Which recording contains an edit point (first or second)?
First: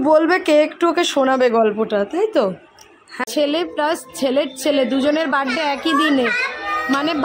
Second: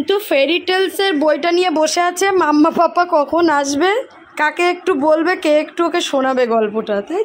first